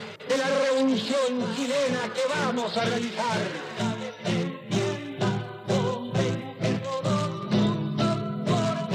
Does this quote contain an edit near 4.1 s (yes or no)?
yes